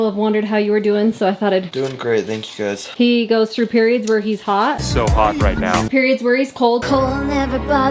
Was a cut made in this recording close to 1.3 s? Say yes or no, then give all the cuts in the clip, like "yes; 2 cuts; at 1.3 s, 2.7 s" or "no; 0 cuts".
no; 2 cuts; at 2.8 s, 5.9 s